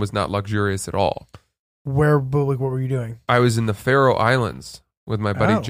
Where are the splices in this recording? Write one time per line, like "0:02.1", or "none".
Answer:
none

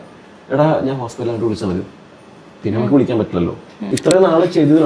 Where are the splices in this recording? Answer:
0:03.9

